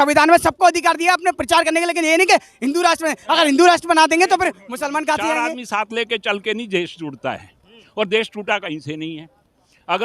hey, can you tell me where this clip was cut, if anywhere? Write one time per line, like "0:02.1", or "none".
0:05.4